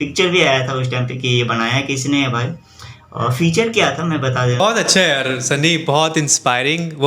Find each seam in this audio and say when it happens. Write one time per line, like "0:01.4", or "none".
0:04.6